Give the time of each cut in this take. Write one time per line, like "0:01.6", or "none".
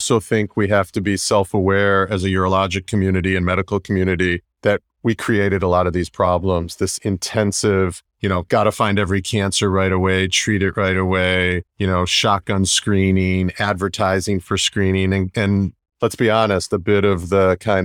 0:04.5
0:08.1
0:11.7